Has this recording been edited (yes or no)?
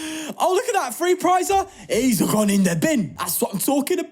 yes